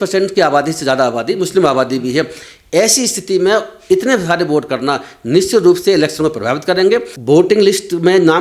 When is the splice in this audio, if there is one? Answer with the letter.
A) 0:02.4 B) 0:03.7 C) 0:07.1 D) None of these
C